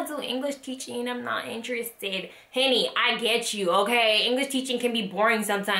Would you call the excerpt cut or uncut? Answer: uncut